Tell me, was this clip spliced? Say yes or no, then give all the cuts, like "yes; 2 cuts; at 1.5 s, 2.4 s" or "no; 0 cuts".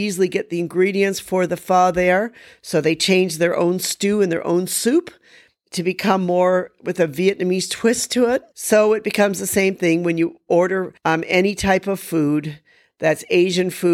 yes; 2 cuts; at 8.5 s, 10.5 s